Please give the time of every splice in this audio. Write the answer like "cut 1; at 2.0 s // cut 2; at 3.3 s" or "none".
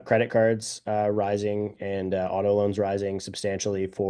none